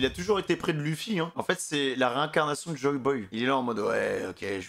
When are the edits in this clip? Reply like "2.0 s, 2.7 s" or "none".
1.4 s